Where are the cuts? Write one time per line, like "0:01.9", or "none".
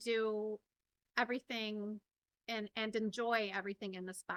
none